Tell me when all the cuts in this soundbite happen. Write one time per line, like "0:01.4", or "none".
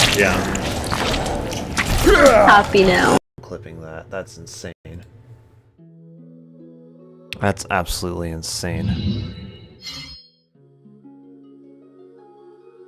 0:03.2
0:04.7